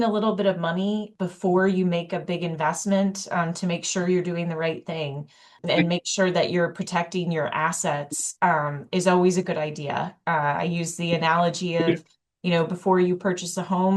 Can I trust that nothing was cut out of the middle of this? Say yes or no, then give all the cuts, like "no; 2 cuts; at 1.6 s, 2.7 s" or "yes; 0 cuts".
yes; 0 cuts